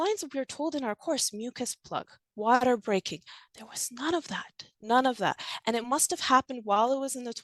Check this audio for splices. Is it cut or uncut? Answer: uncut